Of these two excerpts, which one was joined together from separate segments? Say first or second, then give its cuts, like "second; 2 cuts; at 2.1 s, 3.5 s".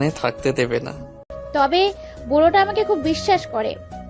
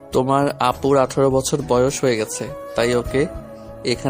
first; 1 cut; at 1.4 s